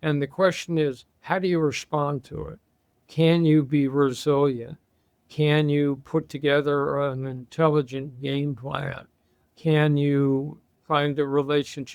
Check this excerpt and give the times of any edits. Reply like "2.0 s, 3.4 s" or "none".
9.4 s